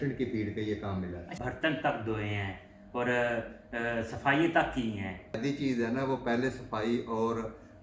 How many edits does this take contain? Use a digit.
2